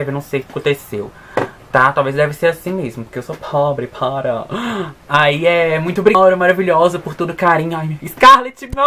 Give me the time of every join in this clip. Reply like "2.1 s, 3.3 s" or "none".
none